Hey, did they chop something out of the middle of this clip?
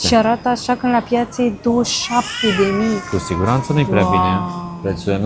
no; 0 cuts

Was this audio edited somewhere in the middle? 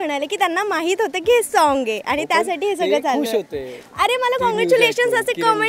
no; 0 cuts

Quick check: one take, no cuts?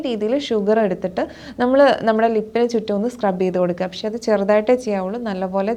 yes; 0 cuts

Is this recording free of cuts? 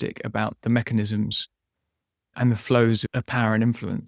no; 2 cuts; at 2.4 s, 3.1 s

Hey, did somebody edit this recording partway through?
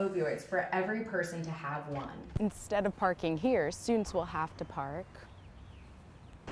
yes; 1 cut; at 2.3 s

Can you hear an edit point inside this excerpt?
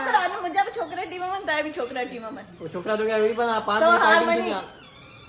no; 0 cuts

